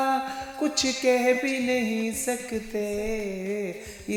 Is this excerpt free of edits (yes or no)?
yes